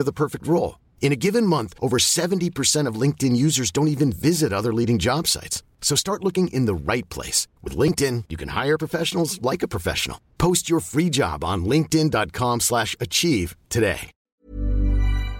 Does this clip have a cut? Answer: yes; 1 cut; at 14.1 s

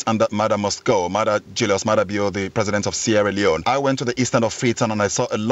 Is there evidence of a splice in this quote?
yes; 1 cut; at 3.6 s

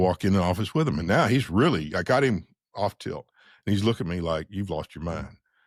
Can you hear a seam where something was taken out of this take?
no; 0 cuts

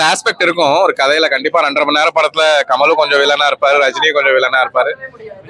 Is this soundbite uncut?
yes; 0 cuts

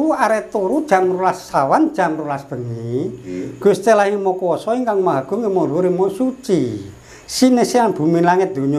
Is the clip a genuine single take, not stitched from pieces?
yes; 0 cuts

